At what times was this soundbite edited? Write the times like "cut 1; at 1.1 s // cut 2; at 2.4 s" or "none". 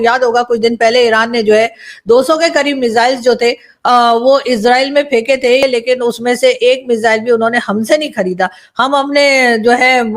cut 1; at 5.6 s